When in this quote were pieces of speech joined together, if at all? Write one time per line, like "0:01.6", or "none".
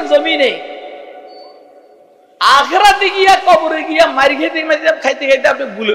none